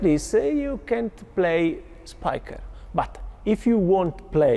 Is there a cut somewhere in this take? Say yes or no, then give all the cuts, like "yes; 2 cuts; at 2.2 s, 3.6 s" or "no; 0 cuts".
no; 0 cuts